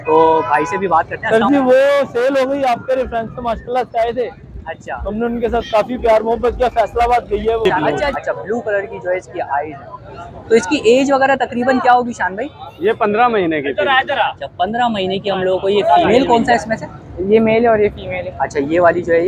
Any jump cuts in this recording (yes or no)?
yes